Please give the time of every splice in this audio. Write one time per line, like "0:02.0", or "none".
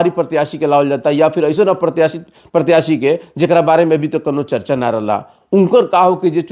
none